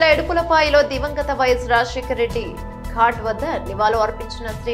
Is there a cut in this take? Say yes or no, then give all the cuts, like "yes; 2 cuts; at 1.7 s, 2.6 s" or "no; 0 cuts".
no; 0 cuts